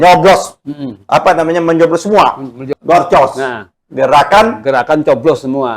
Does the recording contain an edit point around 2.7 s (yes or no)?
yes